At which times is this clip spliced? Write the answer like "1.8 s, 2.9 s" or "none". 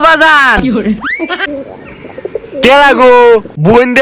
1.4 s